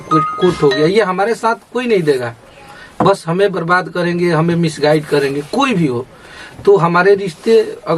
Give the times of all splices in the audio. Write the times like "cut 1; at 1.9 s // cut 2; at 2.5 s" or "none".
none